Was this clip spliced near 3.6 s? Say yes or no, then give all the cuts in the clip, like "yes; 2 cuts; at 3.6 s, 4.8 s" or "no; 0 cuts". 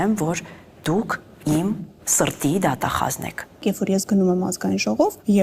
yes; 2 cuts; at 2.0 s, 3.6 s